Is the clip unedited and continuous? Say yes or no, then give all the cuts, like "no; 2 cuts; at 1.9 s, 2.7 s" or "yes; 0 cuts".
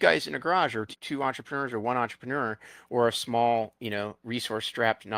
no; 1 cut; at 0.9 s